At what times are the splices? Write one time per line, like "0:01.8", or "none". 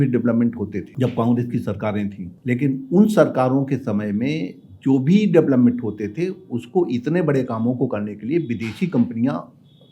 0:00.9
0:02.3